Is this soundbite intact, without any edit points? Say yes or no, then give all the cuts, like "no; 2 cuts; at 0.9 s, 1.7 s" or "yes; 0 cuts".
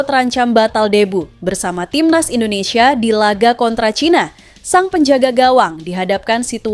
yes; 0 cuts